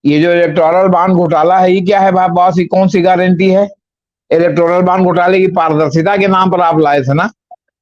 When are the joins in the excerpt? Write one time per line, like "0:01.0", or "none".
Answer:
none